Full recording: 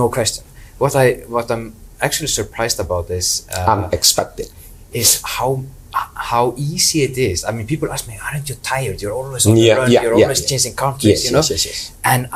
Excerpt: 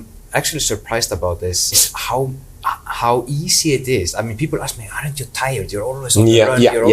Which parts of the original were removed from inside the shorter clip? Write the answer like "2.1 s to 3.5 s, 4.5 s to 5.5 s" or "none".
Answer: 3.5 s to 5.1 s